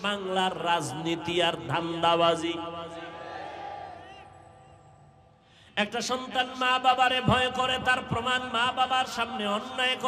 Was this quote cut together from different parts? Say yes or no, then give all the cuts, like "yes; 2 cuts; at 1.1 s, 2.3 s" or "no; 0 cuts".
yes; 1 cut; at 5.5 s